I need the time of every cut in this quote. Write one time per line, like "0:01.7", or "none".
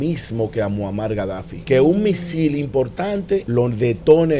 0:01.5
0:03.5